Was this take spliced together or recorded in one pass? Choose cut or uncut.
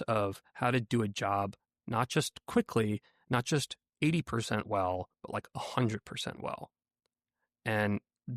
uncut